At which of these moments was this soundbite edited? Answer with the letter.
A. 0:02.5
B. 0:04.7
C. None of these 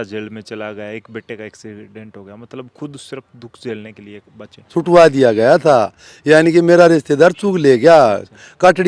B